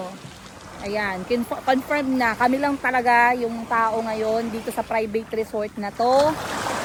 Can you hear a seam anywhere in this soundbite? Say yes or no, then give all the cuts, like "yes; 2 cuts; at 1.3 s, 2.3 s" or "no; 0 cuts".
no; 0 cuts